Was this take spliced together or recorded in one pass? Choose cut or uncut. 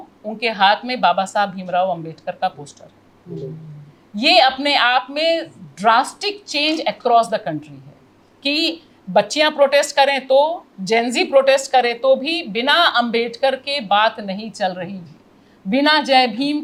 uncut